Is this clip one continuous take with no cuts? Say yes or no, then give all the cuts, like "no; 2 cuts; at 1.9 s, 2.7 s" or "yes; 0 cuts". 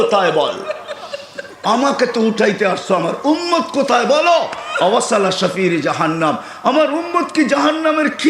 yes; 0 cuts